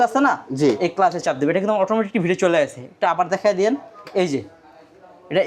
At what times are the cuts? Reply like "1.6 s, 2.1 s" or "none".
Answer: none